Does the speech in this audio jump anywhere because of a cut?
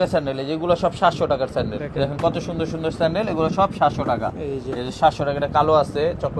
yes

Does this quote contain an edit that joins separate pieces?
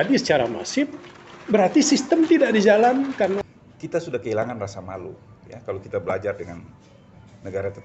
yes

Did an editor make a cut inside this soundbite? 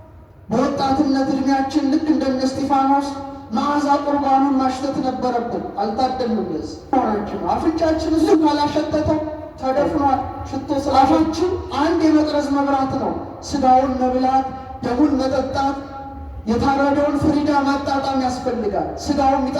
yes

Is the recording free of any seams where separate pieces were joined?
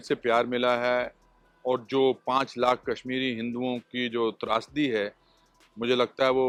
yes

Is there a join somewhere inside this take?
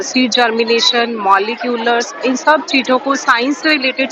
no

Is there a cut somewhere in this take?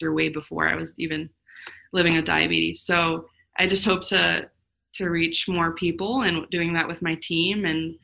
no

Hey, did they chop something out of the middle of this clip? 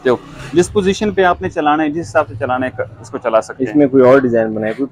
no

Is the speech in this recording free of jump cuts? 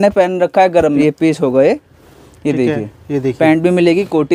no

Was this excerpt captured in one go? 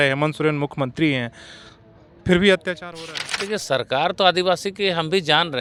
yes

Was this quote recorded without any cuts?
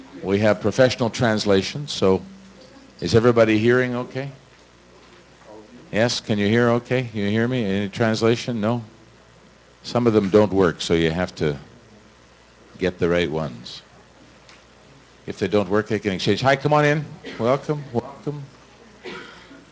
yes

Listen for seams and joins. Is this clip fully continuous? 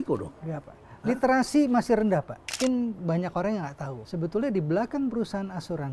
no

